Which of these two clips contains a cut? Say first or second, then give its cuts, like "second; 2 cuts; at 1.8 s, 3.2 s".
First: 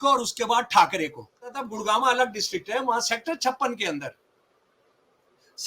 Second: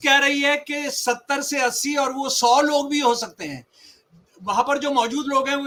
first; 1 cut; at 1.6 s